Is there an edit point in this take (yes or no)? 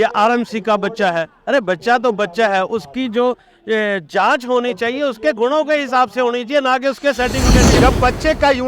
yes